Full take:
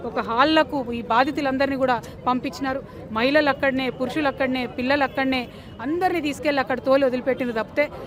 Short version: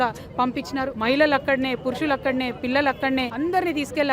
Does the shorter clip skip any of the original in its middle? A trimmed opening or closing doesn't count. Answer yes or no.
yes